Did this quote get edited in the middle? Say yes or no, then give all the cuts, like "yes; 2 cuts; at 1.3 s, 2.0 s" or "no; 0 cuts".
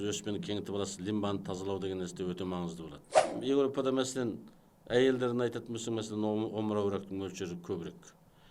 yes; 1 cut; at 3.3 s